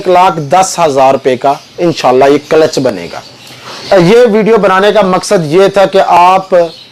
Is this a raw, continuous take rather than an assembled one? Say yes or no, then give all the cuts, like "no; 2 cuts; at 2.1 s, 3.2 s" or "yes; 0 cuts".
no; 1 cut; at 3.7 s